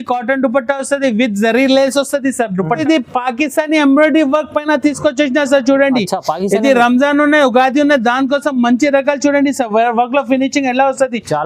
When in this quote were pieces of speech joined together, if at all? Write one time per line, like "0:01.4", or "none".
0:02.8

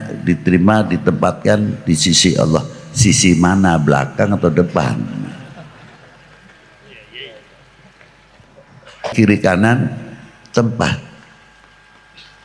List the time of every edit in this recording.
0:09.1

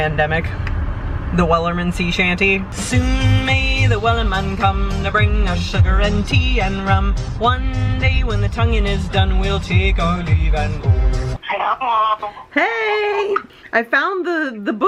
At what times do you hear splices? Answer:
none

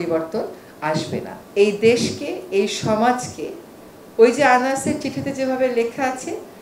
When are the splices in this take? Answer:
0:01.4

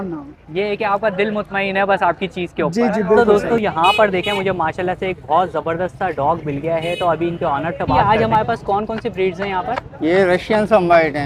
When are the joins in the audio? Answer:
0:03.2
0:07.9

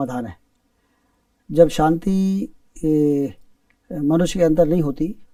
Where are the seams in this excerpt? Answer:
none

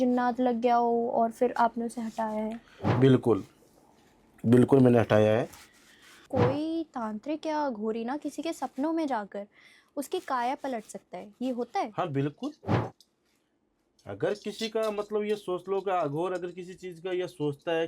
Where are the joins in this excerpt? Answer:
0:06.2

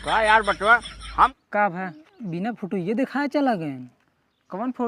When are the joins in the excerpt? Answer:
0:01.3

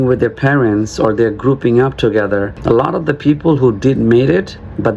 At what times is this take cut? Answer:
0:02.6

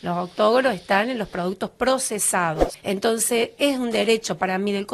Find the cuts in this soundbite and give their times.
0:02.7

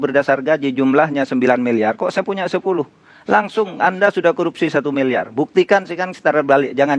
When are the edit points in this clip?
none

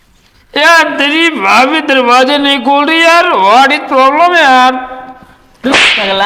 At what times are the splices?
none

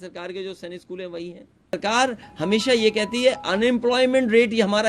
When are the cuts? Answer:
0:01.8

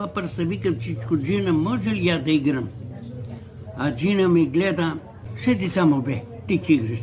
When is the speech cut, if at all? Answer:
0:05.3

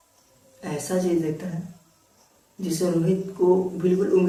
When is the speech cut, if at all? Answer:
none

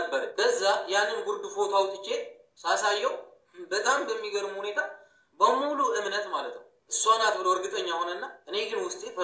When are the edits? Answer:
none

